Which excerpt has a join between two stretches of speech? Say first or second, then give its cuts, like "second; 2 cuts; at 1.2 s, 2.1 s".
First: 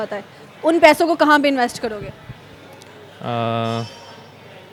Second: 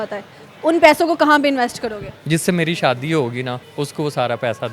second; 2 cuts; at 2.1 s, 3.6 s